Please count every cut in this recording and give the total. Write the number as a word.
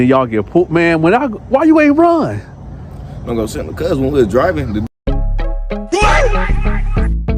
one